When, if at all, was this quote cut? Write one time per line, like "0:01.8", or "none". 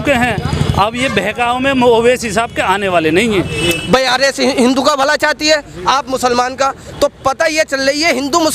0:03.5